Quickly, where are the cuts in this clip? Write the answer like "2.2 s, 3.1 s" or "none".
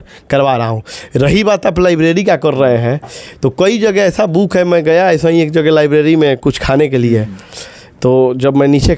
none